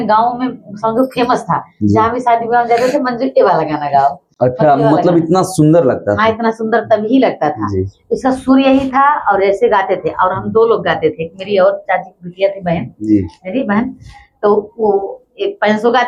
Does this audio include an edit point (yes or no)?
no